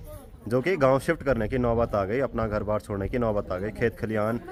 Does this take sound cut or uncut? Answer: uncut